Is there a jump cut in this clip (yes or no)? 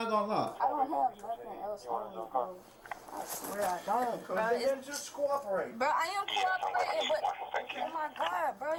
no